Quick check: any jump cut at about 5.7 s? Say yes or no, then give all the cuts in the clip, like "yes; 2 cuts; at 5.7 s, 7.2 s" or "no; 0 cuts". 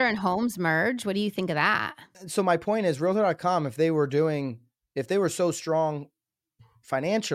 no; 1 cut; at 2.1 s